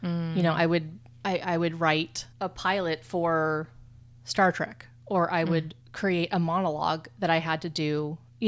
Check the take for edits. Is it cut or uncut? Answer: uncut